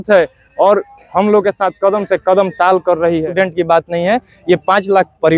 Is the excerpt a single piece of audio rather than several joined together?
no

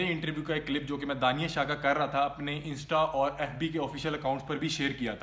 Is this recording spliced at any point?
no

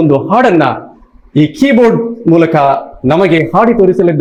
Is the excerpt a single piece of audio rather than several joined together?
yes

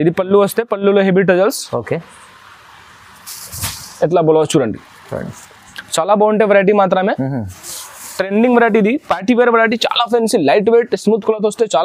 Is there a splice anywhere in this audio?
no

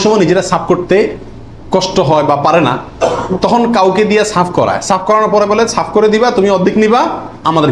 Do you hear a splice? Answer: no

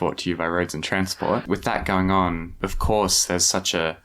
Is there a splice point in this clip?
yes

